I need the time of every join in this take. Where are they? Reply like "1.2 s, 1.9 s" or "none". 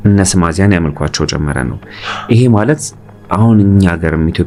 none